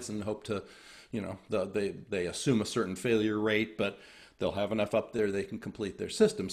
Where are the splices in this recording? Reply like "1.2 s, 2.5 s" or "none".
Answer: none